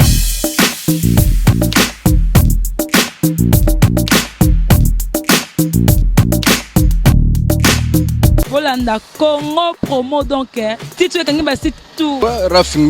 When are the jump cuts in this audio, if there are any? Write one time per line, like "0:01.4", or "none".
0:08.5
0:12.2